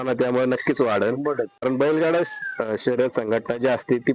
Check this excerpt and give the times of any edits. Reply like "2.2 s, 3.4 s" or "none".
1.6 s

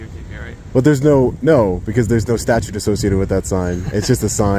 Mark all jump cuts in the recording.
none

